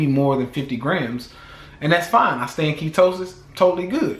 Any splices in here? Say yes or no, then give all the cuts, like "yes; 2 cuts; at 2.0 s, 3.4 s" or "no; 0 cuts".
no; 0 cuts